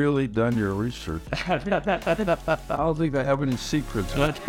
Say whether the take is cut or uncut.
uncut